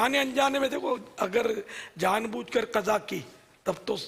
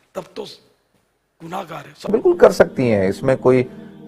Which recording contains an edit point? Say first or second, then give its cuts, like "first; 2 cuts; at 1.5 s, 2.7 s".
second; 1 cut; at 1.9 s